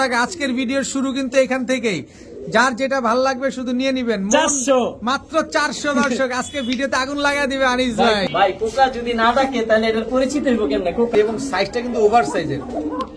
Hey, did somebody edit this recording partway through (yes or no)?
yes